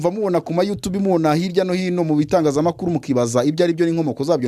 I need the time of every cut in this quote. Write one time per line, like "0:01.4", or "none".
none